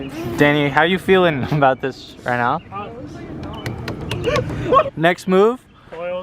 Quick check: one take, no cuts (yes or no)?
no